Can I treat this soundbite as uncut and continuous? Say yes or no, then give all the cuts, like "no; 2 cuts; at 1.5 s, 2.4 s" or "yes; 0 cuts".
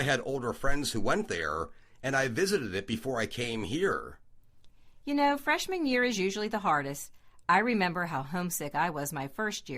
no; 1 cut; at 8.6 s